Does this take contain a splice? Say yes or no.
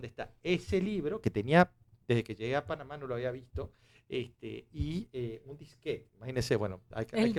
no